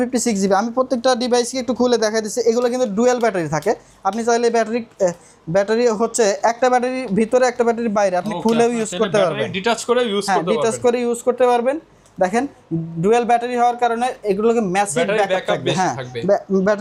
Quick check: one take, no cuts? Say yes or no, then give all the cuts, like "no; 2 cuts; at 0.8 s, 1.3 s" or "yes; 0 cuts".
yes; 0 cuts